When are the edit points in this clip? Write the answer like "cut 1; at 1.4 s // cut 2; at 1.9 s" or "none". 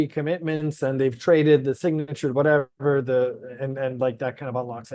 none